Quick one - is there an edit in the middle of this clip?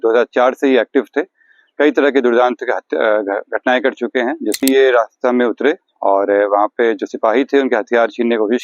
yes; 1 cut; at 4.6 s

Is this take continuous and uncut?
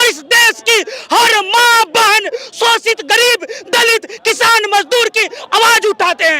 yes; 0 cuts

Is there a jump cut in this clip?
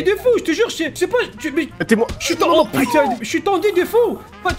yes; 1 cut; at 0.9 s

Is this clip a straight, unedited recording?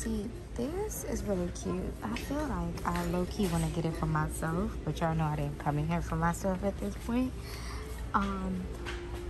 yes; 0 cuts

